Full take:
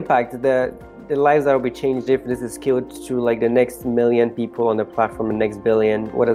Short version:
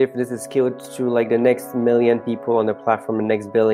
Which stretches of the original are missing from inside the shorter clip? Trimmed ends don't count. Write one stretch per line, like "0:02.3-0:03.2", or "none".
none